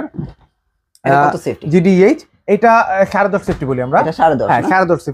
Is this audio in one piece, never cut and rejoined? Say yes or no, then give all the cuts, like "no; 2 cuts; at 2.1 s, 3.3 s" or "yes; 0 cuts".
yes; 0 cuts